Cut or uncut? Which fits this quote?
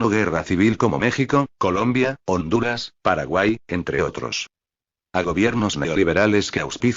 cut